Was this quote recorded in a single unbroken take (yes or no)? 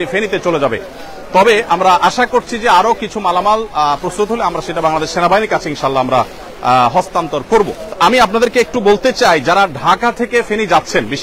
yes